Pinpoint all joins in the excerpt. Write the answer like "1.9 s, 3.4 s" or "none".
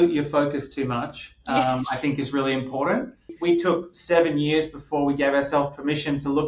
3.3 s